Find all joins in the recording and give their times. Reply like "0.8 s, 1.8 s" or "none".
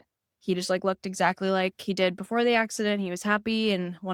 none